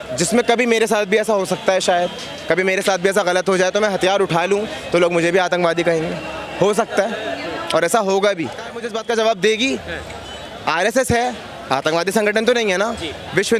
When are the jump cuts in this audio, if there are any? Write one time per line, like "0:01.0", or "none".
0:08.9